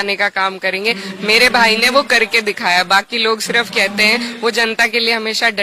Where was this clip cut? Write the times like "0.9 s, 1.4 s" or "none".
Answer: none